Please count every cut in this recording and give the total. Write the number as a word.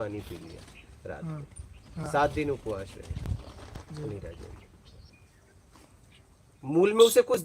one